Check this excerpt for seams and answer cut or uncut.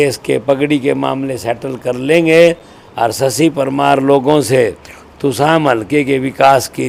uncut